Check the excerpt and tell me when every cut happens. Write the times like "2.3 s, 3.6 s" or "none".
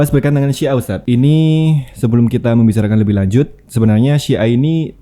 0.9 s